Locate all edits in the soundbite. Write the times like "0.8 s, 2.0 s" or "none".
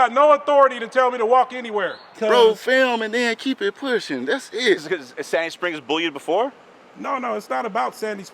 2.0 s, 4.8 s